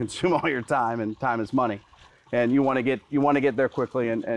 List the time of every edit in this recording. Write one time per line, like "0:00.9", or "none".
none